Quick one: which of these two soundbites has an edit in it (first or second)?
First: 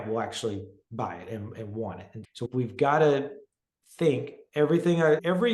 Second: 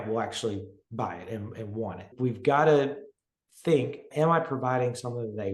second